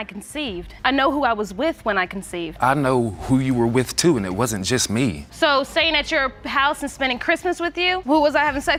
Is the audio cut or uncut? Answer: uncut